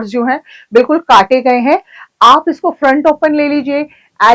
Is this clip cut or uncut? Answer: uncut